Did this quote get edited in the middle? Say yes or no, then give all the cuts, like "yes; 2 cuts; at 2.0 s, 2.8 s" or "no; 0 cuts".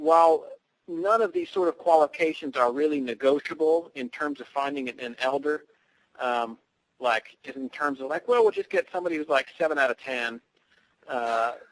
yes; 1 cut; at 8.6 s